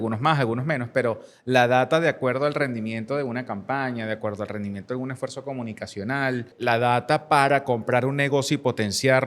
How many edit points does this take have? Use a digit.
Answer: 1